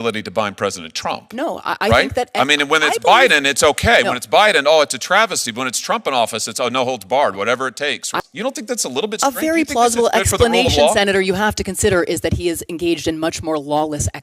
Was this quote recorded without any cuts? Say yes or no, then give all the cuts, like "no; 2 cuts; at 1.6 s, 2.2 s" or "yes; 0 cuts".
no; 1 cut; at 8.1 s